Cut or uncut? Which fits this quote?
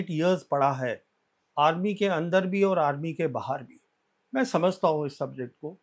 uncut